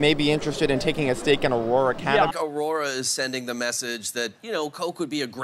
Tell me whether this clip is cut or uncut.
cut